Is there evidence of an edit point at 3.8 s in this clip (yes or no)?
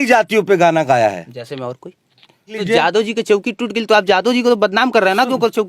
no